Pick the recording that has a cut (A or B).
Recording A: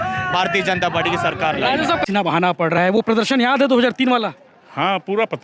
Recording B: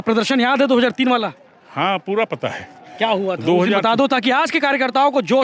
A